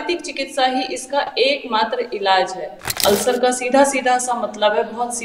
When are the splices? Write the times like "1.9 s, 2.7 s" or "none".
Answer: 3.0 s

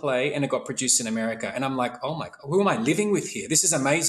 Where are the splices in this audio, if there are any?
none

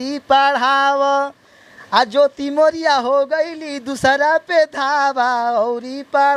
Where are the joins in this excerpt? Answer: none

